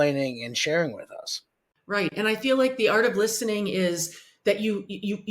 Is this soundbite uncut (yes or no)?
no